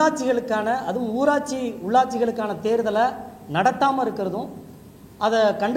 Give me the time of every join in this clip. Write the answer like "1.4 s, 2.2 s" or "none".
none